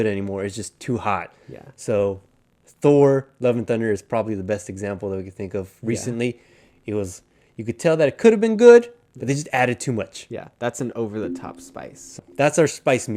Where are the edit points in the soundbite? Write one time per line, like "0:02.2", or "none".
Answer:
0:12.2